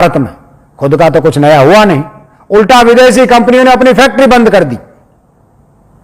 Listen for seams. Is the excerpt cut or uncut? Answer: uncut